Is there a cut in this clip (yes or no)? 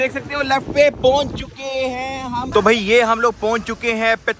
yes